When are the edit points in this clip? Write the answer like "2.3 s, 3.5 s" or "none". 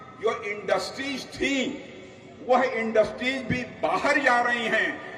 none